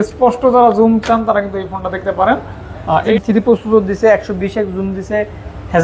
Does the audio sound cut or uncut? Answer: cut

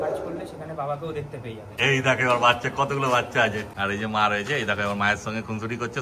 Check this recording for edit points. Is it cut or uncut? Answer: cut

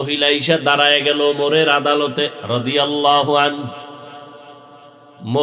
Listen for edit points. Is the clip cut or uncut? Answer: uncut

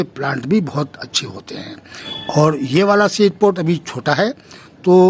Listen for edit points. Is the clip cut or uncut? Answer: cut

